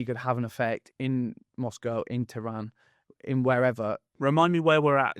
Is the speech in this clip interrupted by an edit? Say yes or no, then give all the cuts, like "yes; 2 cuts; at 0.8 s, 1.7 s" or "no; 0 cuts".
yes; 1 cut; at 4.1 s